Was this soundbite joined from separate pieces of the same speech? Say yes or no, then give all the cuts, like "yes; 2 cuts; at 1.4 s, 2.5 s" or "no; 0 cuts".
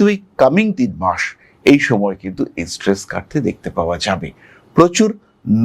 no; 0 cuts